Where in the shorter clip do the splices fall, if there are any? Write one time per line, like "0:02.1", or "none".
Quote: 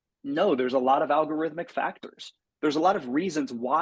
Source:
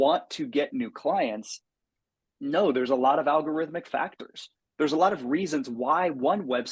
none